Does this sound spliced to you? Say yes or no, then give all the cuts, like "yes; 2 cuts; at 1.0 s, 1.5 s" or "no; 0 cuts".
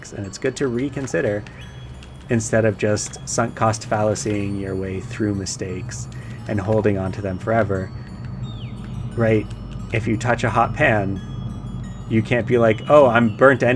no; 0 cuts